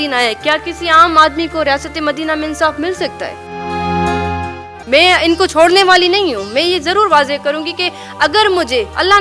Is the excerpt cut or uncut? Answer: cut